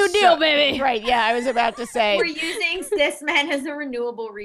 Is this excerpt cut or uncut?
cut